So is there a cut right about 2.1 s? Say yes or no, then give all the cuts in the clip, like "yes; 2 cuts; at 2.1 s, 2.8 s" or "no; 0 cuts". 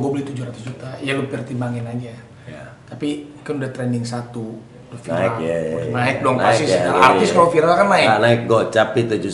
no; 0 cuts